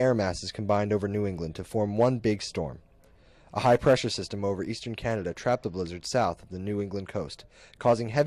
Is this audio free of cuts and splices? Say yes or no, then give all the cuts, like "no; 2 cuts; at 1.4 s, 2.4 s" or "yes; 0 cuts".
no; 1 cut; at 5.4 s